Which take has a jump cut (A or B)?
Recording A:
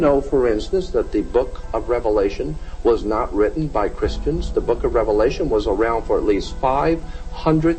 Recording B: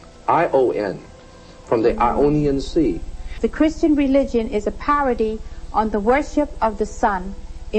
B